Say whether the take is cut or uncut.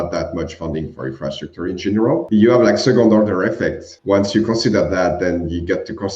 cut